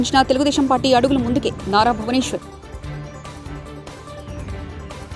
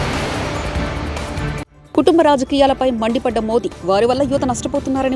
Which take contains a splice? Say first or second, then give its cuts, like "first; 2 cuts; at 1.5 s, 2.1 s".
second; 1 cut; at 1.7 s